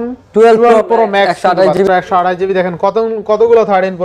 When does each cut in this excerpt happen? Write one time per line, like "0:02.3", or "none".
0:01.8